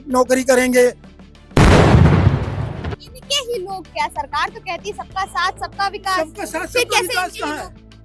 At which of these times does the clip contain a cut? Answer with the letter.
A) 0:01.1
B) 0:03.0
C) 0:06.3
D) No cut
D